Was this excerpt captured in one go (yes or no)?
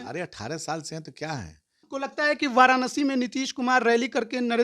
no